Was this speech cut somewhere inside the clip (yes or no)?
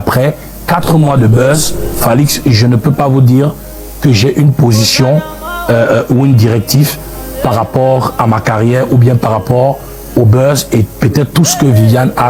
no